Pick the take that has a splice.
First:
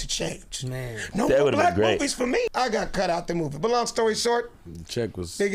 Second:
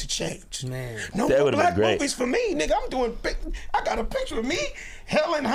first; 1 cut; at 2.5 s

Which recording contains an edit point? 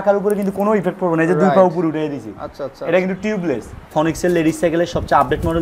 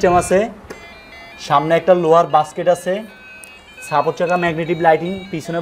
first; 1 cut; at 3.9 s

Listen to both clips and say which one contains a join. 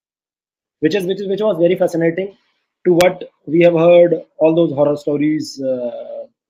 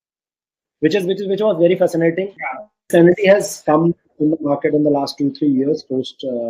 second; 1 cut; at 2.8 s

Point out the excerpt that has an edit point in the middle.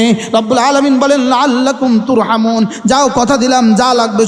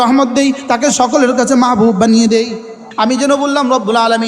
second; 1 cut; at 2.9 s

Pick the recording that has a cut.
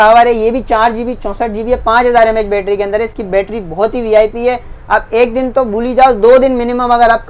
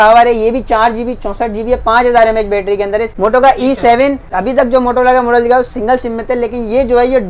second; 2 cuts; at 3.1 s, 4.3 s

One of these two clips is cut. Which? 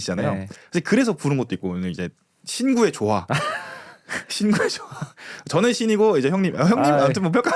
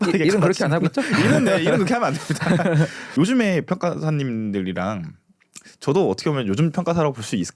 second; 1 cut; at 3.0 s

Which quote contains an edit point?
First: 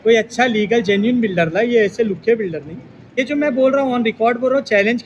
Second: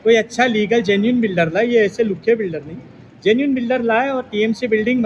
first; 1 cut; at 3.2 s

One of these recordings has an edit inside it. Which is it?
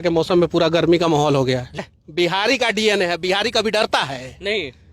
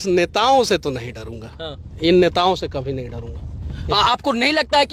first; 1 cut; at 1.8 s

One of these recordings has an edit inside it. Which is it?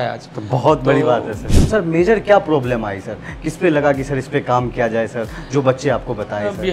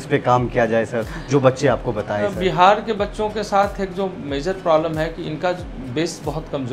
first; 1 cut; at 1.7 s

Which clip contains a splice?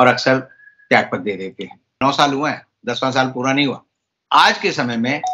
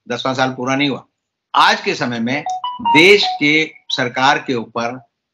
first; 1 cut; at 1.8 s

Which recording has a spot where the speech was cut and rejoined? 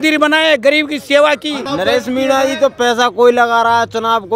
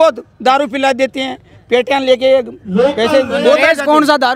first; 1 cut; at 1.6 s

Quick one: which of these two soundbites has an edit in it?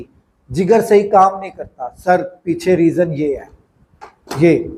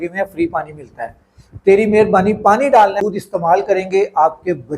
second; 1 cut; at 3.0 s

